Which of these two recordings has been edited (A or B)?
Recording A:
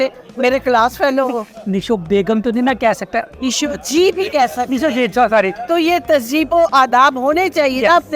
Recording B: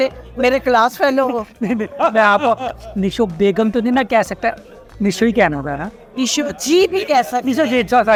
A